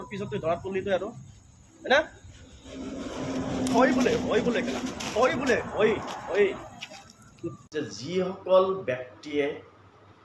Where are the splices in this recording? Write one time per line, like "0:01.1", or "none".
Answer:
0:07.6